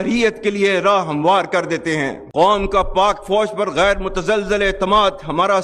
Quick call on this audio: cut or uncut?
uncut